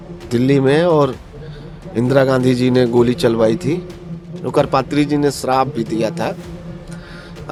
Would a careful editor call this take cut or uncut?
uncut